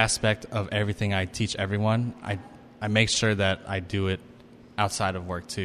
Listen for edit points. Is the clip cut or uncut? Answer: uncut